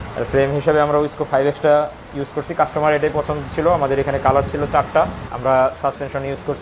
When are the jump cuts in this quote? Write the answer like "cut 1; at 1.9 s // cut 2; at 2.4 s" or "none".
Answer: cut 1; at 5.2 s